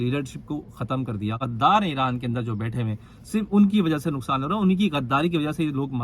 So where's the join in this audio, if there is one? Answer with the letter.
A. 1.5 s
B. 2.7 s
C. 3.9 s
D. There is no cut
A